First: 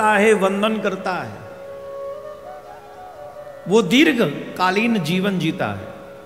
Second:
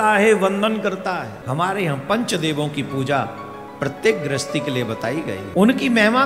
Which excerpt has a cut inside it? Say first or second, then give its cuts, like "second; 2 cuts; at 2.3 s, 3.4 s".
second; 2 cuts; at 1.4 s, 5.4 s